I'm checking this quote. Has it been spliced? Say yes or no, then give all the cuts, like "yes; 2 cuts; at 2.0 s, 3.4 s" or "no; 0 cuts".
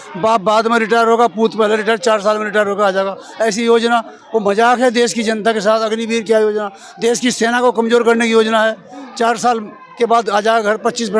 no; 0 cuts